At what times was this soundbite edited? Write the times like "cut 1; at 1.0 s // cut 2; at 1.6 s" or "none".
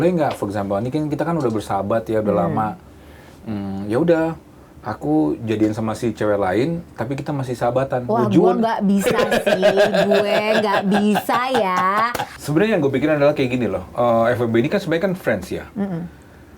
cut 1; at 12.2 s